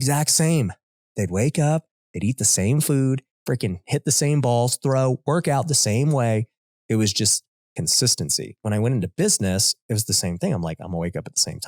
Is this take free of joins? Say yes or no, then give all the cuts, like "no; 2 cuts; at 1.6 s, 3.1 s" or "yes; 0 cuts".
no; 2 cuts; at 3.3 s, 8.6 s